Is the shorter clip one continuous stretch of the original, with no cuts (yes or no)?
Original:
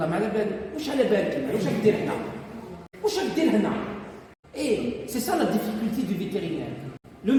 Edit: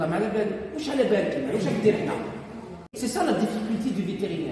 no